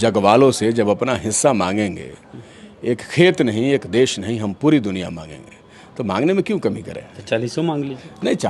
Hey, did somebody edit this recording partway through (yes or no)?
no